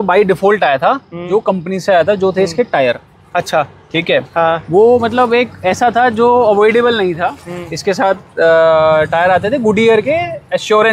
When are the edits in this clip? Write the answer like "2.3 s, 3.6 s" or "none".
none